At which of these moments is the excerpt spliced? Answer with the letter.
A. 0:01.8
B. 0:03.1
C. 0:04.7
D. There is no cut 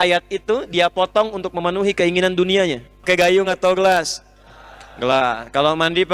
B